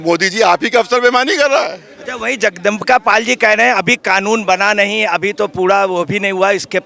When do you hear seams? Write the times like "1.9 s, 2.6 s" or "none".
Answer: none